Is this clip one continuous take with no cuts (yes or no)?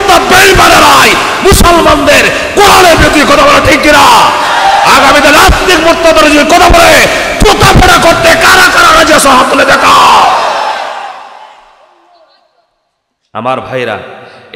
yes